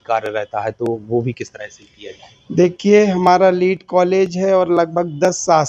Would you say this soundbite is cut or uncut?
uncut